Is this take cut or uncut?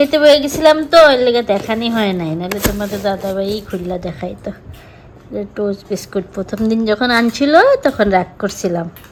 uncut